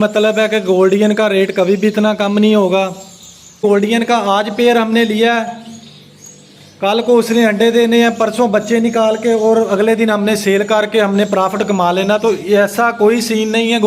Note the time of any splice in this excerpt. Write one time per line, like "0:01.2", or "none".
0:03.6